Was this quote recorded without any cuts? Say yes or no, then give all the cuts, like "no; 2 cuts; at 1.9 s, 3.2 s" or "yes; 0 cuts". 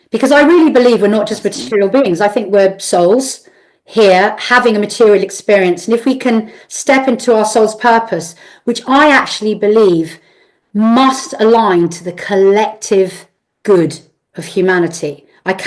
yes; 0 cuts